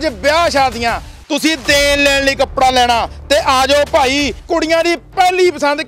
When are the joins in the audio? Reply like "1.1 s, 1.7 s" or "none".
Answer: 4.4 s